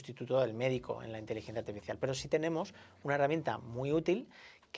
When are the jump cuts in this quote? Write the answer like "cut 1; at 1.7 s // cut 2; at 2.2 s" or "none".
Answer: none